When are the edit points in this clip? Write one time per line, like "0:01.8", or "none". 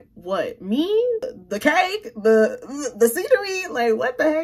none